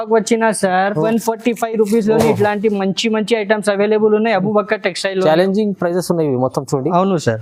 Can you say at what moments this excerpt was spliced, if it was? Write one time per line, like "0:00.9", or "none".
0:01.0